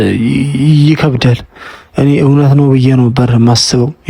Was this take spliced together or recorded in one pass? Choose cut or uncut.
uncut